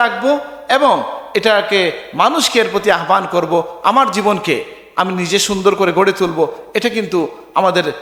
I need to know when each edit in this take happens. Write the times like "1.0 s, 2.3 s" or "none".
none